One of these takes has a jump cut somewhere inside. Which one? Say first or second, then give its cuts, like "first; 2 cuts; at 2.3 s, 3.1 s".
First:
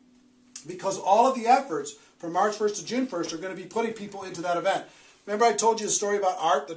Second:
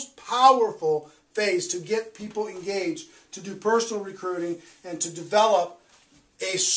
second; 1 cut; at 4.9 s